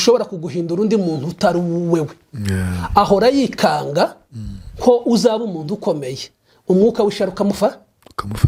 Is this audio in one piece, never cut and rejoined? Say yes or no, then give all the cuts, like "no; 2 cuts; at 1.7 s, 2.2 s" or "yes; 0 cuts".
yes; 0 cuts